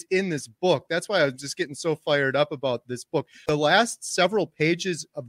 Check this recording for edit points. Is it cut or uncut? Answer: cut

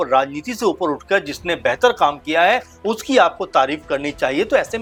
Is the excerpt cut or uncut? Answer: uncut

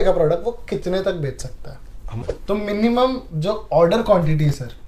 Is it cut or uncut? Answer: cut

